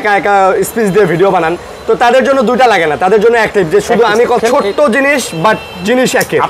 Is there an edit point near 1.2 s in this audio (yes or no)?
no